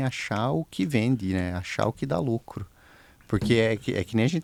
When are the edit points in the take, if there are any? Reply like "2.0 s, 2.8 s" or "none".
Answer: none